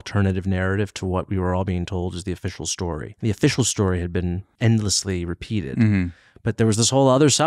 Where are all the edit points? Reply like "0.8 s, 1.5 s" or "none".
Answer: 3.1 s, 4.5 s